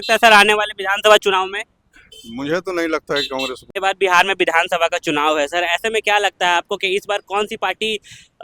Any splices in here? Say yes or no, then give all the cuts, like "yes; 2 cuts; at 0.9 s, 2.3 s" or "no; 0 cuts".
no; 0 cuts